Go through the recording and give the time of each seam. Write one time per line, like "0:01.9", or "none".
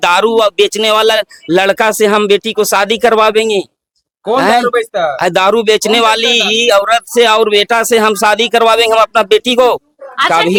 none